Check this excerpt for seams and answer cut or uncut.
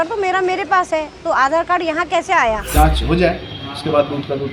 cut